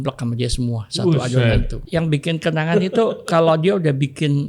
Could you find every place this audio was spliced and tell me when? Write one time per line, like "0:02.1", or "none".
0:01.8

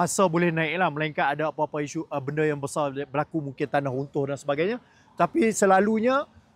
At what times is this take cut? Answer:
none

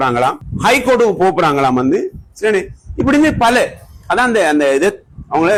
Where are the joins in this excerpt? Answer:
none

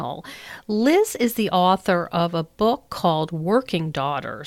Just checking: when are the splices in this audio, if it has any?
none

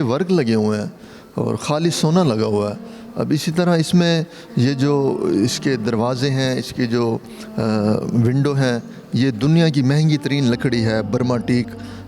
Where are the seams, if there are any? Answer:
none

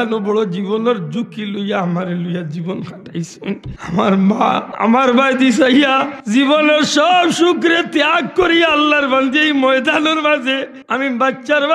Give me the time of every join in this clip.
0:03.7
0:04.7
0:06.1
0:10.8

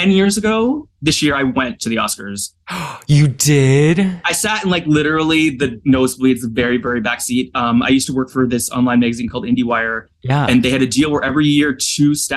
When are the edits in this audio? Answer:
0:00.9

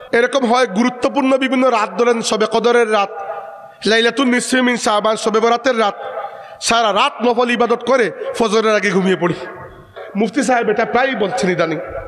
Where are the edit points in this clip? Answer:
0:10.3

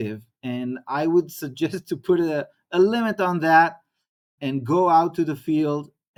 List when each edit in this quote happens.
none

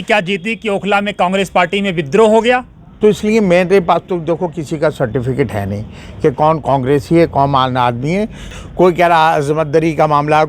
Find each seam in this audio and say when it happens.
0:02.8
0:08.5

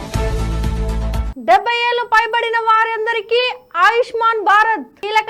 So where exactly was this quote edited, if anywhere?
0:01.2

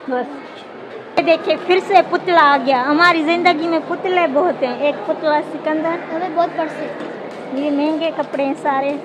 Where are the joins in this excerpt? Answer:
0:01.1

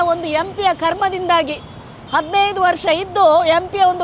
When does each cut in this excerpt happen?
none

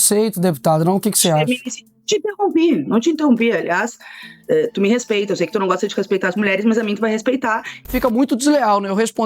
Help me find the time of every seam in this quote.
0:07.9

